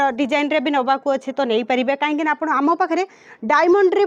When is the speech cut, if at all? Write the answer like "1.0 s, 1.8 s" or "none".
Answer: none